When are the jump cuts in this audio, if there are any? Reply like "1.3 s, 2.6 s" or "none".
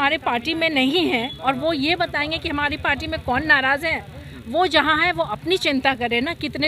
none